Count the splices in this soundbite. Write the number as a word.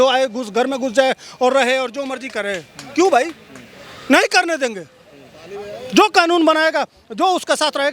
zero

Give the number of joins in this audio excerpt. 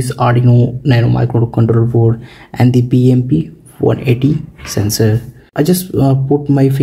one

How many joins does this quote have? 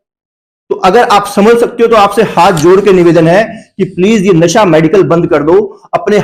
zero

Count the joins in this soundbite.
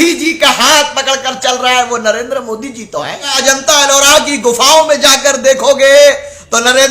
one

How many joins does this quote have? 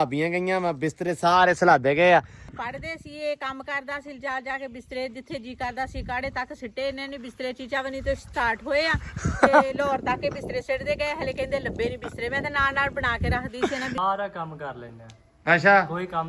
two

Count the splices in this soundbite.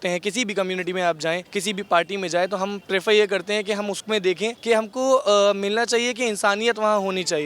three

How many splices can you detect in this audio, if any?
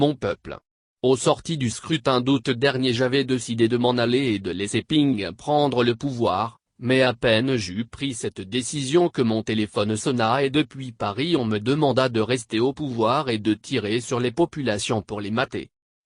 one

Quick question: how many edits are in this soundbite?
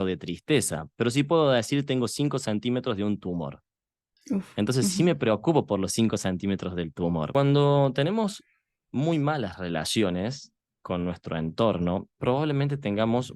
one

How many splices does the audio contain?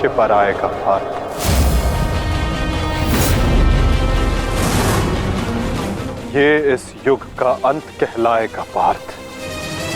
zero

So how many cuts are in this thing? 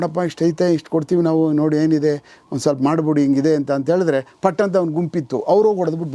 zero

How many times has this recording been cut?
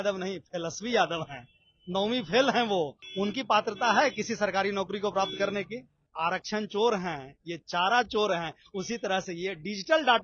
two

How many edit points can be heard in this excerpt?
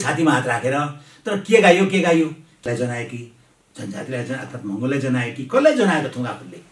one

